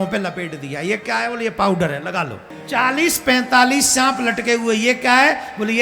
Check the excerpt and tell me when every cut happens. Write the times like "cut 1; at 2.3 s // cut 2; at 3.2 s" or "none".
cut 1; at 2.5 s